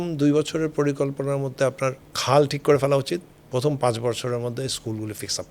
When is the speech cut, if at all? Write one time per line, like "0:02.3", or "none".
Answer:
0:02.1
0:03.4